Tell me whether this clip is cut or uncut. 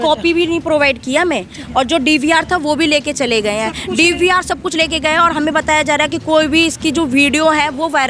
uncut